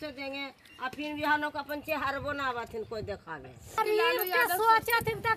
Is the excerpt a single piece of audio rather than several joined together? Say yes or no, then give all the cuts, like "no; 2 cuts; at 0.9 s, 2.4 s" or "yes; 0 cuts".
no; 1 cut; at 3.8 s